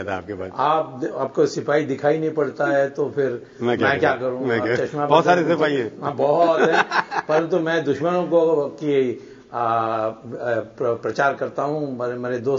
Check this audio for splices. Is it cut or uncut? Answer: uncut